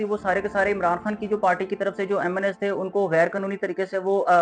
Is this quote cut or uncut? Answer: uncut